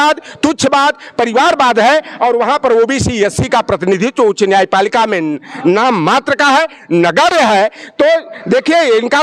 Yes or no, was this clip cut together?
no